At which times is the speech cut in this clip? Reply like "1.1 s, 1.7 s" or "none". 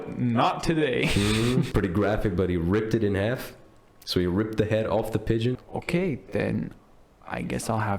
1.7 s, 5.6 s